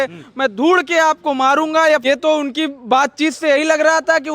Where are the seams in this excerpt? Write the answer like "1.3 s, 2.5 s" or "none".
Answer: 2.0 s